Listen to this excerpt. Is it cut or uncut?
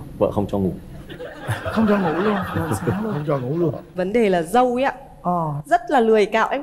cut